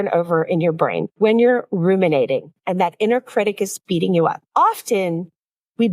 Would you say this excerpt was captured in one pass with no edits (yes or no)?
no